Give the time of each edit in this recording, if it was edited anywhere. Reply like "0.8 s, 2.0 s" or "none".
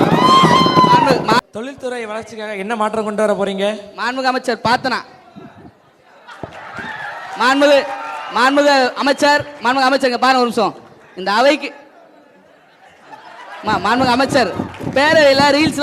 1.4 s